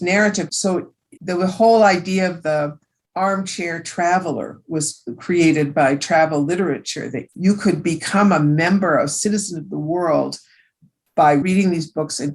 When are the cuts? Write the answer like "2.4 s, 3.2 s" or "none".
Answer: 0.7 s, 11.4 s